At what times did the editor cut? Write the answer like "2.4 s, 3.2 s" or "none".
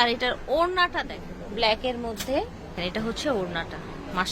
0.9 s